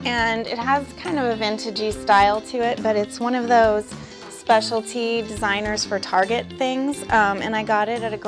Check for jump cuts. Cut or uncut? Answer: cut